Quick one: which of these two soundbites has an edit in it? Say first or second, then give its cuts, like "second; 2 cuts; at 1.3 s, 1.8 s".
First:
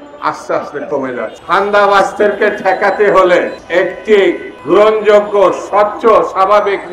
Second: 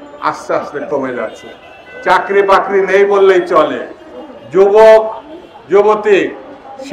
first; 3 cuts; at 1.4 s, 3.6 s, 4.5 s